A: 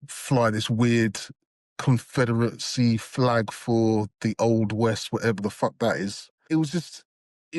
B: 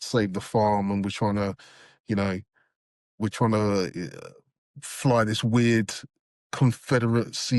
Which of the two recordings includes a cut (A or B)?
A